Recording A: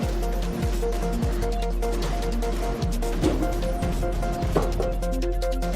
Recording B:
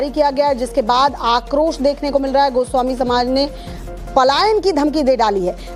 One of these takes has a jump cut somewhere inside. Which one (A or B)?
A